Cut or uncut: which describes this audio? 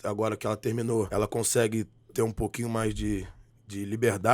cut